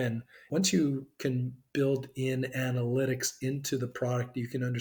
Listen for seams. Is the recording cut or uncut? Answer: uncut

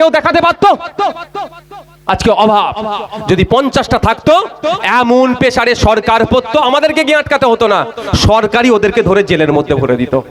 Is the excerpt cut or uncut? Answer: uncut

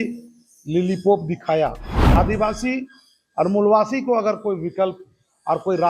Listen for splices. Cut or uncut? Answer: cut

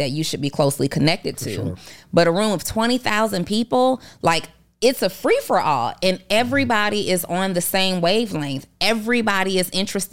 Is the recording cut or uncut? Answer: uncut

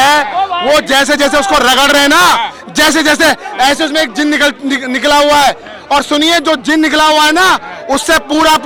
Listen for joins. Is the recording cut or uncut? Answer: uncut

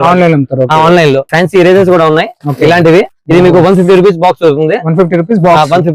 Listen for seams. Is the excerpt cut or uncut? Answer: cut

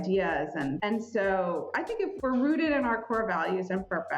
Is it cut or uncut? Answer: cut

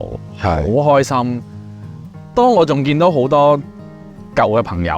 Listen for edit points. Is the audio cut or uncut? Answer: uncut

